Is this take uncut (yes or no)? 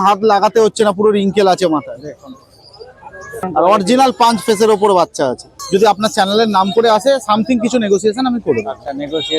no